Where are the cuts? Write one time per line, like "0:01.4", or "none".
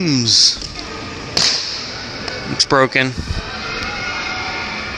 none